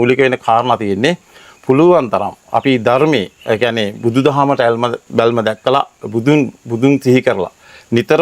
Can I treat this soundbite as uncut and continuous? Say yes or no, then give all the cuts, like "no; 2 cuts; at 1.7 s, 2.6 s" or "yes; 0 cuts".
yes; 0 cuts